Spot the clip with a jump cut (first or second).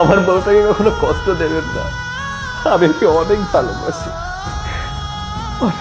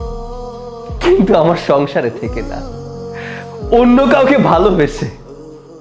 second